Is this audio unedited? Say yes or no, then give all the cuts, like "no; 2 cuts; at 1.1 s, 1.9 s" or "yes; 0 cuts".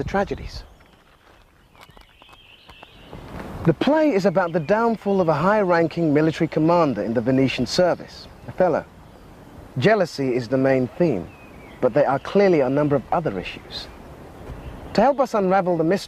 no; 1 cut; at 5.5 s